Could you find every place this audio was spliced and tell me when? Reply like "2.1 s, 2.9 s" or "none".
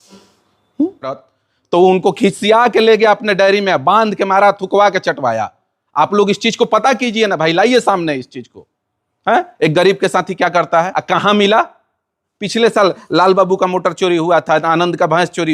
1.2 s, 11.0 s